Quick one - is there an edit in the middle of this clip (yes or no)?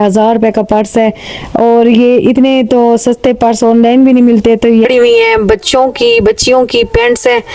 yes